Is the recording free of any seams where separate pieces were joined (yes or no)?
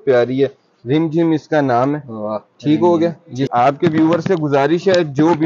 no